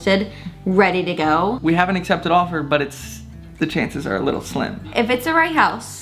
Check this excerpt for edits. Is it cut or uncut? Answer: cut